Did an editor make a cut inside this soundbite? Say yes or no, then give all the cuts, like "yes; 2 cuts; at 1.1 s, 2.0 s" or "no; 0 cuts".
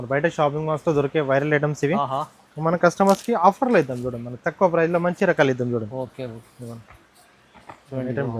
no; 0 cuts